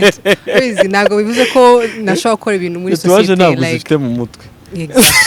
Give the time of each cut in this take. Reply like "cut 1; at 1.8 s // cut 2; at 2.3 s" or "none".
none